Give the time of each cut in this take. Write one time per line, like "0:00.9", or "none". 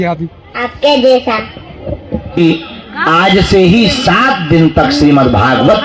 0:02.4